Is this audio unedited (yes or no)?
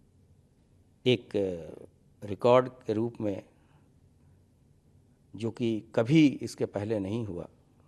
yes